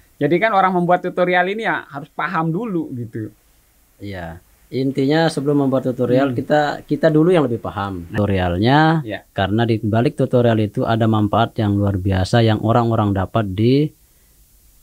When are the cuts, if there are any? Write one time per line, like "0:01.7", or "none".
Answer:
0:08.1